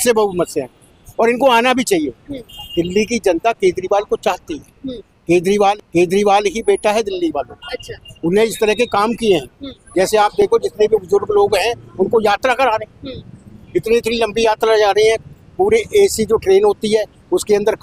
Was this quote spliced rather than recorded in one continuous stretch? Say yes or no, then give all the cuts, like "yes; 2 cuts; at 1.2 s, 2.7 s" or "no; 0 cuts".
no; 0 cuts